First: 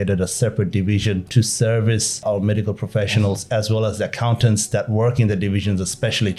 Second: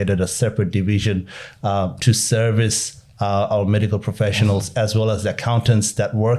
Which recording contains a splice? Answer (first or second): first